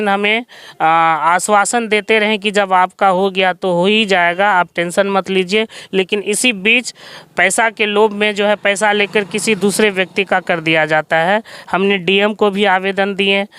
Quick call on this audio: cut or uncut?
uncut